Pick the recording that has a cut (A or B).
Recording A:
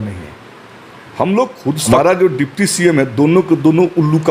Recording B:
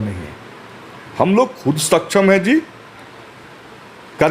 A